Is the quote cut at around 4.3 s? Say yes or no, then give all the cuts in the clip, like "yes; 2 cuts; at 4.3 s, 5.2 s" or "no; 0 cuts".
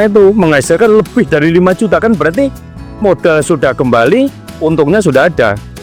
no; 0 cuts